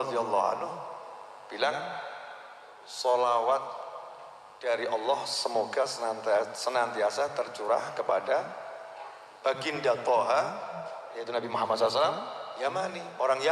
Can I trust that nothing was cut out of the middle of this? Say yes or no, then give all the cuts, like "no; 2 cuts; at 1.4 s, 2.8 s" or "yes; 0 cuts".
yes; 0 cuts